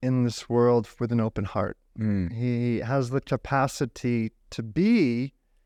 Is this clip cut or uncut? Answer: uncut